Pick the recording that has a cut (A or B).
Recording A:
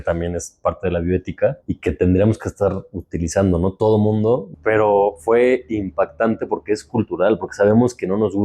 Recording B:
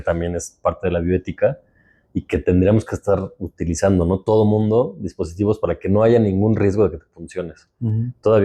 A